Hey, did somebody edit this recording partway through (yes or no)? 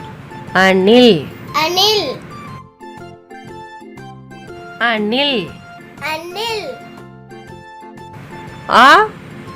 yes